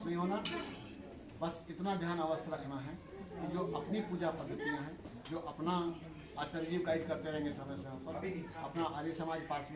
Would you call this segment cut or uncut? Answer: uncut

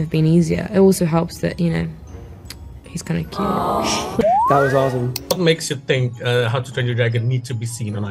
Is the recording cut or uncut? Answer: cut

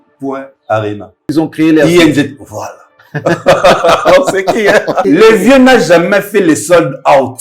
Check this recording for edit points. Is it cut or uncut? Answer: cut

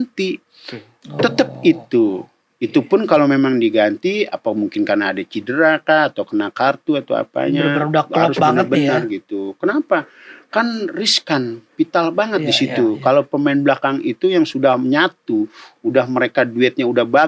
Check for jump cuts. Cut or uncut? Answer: uncut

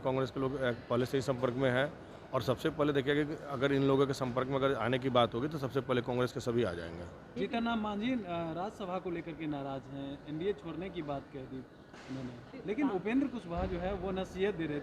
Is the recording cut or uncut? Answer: cut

